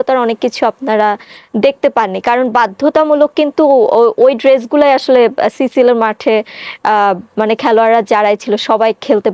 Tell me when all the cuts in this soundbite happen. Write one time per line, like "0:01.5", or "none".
none